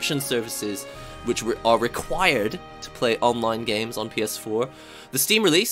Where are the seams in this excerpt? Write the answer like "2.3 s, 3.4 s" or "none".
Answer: none